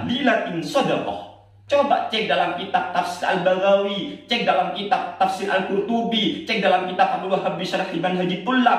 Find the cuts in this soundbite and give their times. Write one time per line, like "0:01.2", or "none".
0:01.5